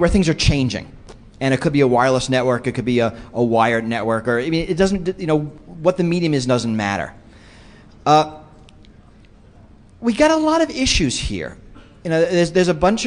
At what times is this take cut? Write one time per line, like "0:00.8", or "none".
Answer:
0:11.6